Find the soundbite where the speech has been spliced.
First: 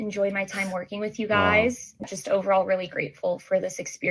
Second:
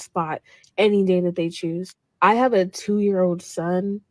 first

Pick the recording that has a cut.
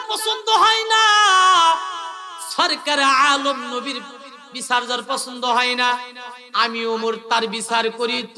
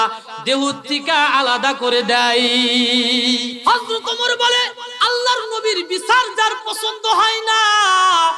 second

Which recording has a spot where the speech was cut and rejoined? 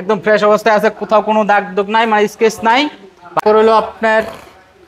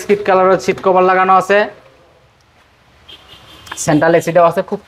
first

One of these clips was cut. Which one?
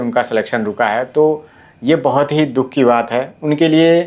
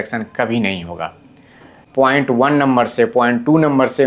second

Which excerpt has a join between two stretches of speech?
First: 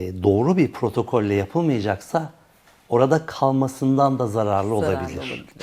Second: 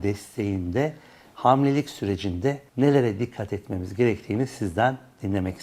second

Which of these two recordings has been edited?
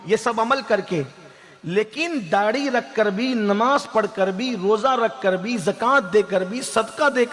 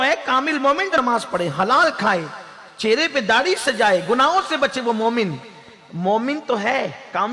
second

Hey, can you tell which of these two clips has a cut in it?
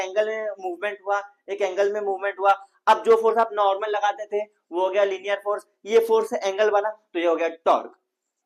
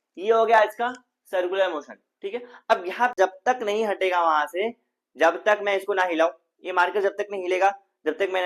second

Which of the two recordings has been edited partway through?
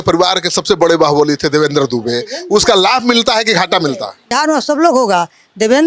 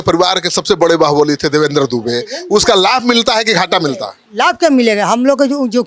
first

